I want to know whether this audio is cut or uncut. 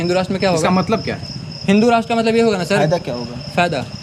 uncut